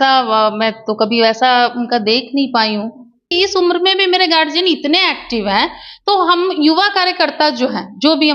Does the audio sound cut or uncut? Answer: cut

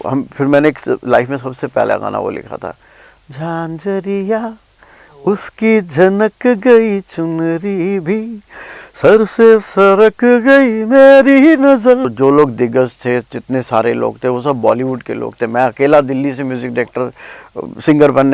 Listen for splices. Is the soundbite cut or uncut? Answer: cut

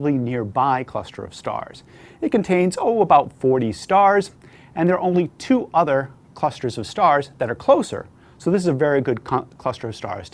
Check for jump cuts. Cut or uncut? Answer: uncut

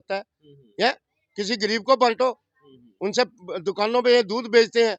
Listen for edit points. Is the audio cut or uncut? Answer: uncut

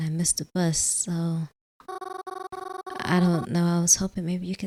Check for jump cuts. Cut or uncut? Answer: uncut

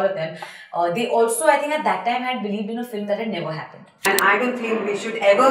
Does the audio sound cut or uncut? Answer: cut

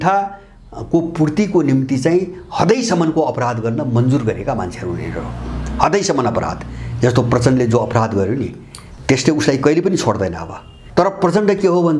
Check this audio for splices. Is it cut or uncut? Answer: cut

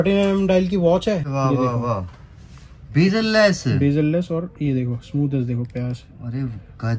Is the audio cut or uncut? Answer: cut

